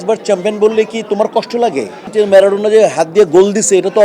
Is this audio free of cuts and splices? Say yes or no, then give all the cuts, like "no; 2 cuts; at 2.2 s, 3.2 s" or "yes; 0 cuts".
no; 1 cut; at 2.1 s